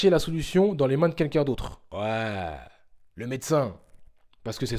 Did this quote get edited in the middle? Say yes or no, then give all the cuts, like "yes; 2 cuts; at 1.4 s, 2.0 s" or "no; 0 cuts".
yes; 1 cut; at 1.8 s